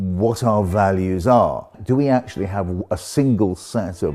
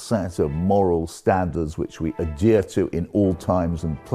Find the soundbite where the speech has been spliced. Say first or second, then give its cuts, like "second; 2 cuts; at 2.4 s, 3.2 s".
first; 1 cut; at 1.7 s